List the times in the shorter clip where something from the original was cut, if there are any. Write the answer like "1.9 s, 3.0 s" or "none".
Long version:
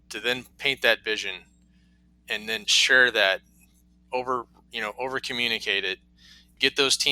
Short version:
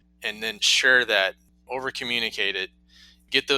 1.6 s